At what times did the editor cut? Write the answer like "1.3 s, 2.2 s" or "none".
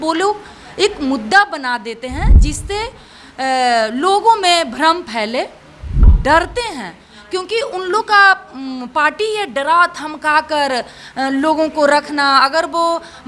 6.1 s